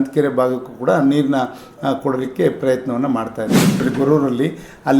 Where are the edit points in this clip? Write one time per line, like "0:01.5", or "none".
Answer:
0:03.8